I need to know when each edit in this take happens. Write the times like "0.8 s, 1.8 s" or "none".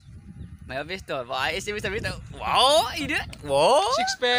none